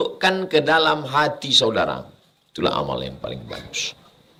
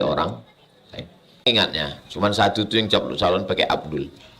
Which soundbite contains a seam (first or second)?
second